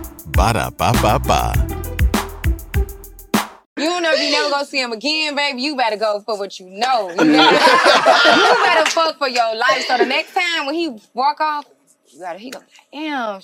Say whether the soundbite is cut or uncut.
cut